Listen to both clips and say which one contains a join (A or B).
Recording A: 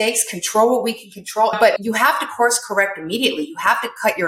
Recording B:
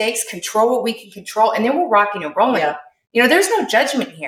A